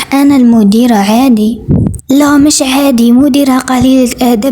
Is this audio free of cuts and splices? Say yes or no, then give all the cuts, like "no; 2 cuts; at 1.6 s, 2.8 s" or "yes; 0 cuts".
no; 1 cut; at 1.9 s